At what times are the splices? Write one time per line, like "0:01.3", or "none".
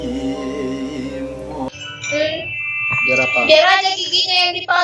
0:01.7